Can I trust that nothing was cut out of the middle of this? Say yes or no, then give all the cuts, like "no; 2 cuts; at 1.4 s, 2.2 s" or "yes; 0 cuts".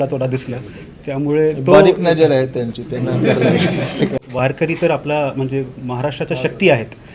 no; 1 cut; at 4.2 s